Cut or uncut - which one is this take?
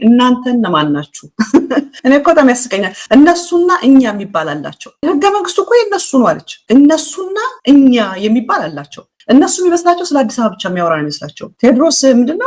uncut